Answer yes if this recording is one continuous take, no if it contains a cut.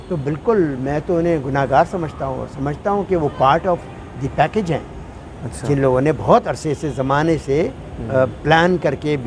yes